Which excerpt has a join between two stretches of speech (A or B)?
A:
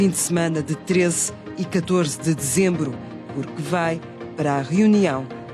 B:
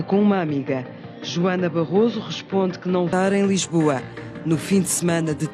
B